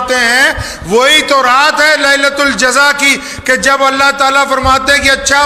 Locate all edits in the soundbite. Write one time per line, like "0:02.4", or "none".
none